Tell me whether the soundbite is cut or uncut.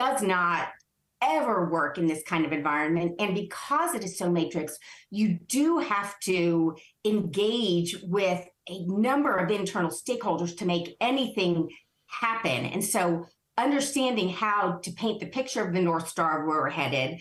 uncut